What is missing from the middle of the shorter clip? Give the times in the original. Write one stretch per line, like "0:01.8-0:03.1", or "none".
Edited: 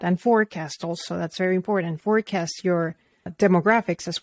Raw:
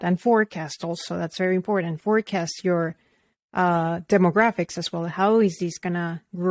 0:03.3-0:04.0